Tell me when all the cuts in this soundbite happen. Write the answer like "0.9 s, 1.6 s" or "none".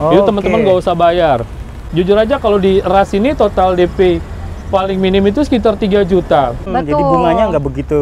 1.8 s, 6.6 s